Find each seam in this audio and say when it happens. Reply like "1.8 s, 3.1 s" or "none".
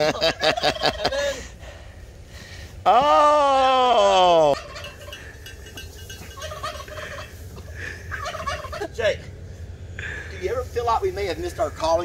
4.5 s, 8.8 s